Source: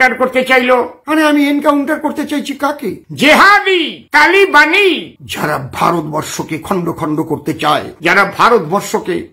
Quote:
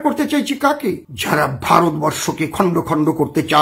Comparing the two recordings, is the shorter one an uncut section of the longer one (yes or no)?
no